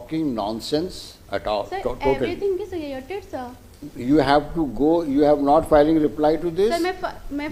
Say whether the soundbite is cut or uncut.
uncut